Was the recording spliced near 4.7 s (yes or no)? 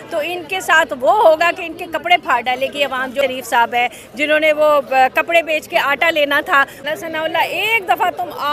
no